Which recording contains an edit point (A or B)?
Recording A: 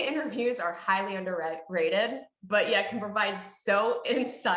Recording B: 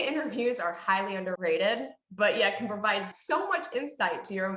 B